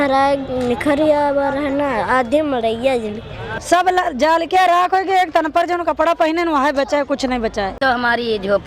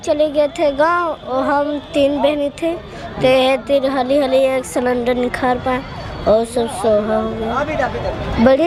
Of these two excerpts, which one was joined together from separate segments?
first; 2 cuts; at 3.5 s, 7.7 s

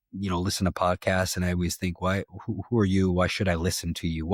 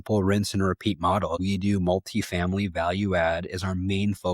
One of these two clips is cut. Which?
second; 1 cut; at 1.4 s

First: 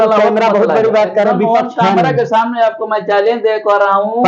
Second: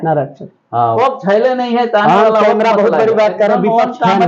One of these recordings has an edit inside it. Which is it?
second; 1 cut; at 0.9 s

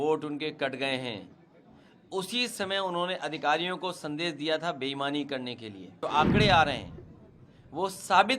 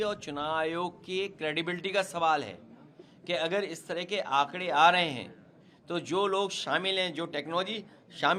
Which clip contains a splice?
first; 1 cut; at 6.0 s

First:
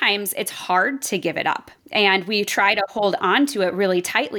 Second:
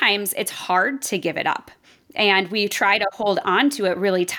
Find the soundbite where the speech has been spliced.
first; 1 cut; at 1.7 s

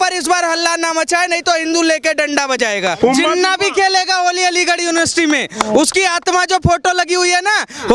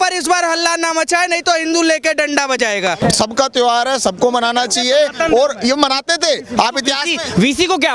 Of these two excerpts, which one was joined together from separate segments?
first; 1 cut; at 3.0 s

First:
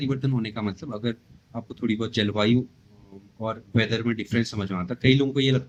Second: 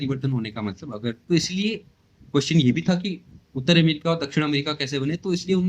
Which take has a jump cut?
second; 1 cut; at 1.2 s

